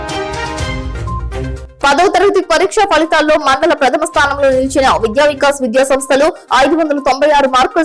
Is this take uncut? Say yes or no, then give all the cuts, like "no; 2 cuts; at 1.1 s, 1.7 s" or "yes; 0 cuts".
no; 1 cut; at 1.3 s